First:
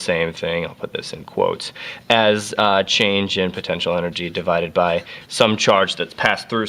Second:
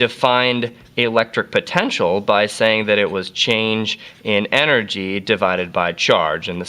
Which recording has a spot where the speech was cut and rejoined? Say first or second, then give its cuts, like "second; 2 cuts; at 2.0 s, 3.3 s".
second; 1 cut; at 2.1 s